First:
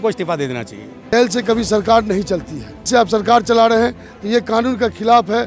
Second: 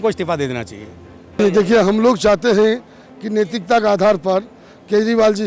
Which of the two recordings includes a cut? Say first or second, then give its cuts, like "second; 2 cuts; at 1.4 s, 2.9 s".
first; 2 cuts; at 1.1 s, 2.9 s